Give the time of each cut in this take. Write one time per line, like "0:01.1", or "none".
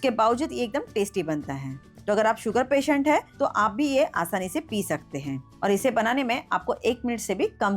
0:05.4